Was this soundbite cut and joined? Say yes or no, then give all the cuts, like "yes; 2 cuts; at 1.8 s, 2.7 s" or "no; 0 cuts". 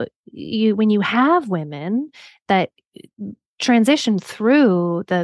no; 0 cuts